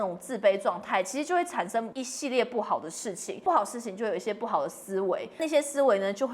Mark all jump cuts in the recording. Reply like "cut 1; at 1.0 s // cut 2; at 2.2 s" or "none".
cut 1; at 2.0 s // cut 2; at 3.4 s // cut 3; at 5.4 s